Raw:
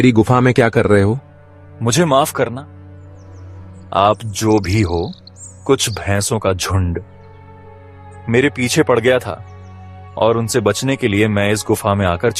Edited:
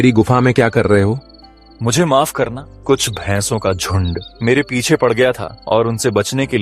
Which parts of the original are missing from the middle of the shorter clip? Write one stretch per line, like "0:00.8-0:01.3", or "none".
0:02.7-0:05.5
0:07.1-0:08.1
0:09.4-0:10.0